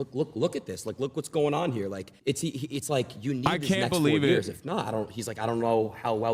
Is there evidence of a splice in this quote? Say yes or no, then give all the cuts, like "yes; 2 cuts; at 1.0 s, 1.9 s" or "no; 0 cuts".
yes; 1 cut; at 2.1 s